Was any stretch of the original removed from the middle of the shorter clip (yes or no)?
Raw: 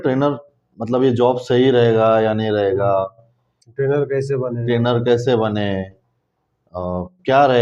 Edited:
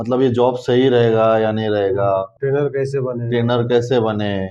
yes